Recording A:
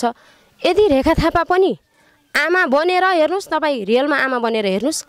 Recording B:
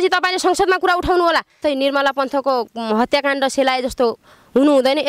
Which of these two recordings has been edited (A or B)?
B